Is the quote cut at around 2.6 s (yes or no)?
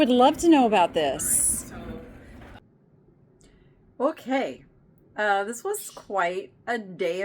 yes